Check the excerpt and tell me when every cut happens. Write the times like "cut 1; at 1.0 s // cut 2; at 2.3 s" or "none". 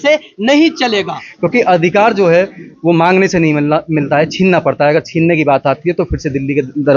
cut 1; at 1.2 s